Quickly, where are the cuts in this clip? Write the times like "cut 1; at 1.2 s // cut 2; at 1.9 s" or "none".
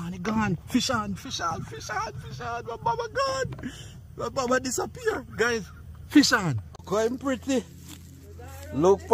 cut 1; at 6.8 s